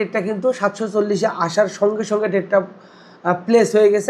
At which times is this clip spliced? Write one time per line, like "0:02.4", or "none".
none

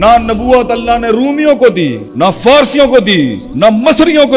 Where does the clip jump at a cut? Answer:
0:02.0
0:03.4

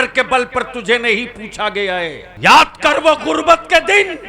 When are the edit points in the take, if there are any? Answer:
0:02.2

